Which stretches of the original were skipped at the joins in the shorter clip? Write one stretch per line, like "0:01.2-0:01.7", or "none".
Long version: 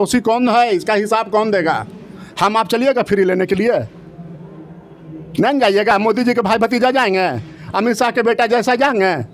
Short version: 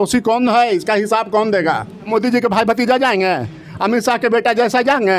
0:02.1-0:06.0